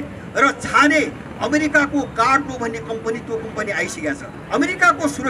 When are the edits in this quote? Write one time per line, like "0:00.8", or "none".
0:04.3